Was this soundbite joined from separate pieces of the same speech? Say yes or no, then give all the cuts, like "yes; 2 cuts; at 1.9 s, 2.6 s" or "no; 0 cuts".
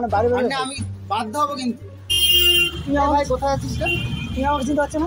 yes; 1 cut; at 2.1 s